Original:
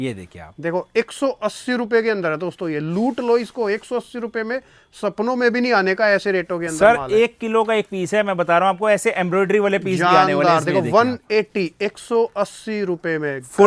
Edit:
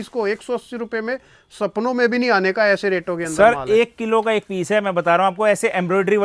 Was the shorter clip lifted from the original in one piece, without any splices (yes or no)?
yes